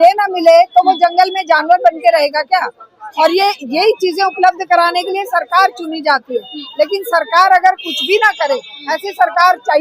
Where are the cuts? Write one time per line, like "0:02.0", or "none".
none